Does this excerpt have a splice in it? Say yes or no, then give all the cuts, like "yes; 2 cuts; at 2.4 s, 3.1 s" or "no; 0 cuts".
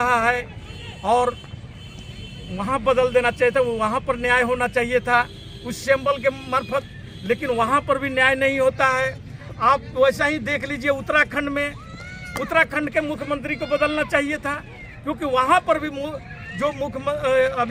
no; 0 cuts